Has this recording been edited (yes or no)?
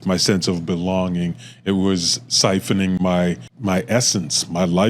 yes